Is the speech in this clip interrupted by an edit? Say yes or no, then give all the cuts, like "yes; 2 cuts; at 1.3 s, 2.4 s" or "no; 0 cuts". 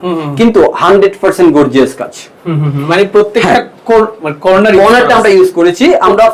no; 0 cuts